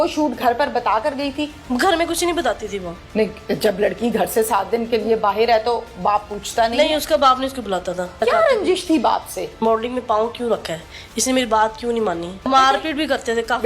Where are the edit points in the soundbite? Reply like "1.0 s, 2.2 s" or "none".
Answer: 1.6 s, 8.2 s, 9.6 s, 12.5 s